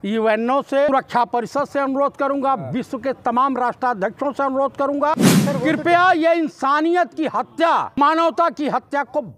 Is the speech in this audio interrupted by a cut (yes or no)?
yes